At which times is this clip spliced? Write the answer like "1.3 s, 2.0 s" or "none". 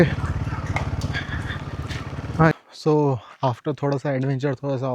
2.5 s